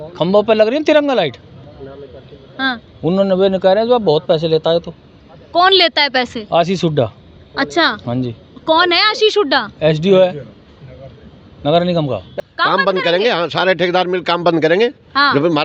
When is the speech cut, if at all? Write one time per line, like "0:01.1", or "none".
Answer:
0:12.3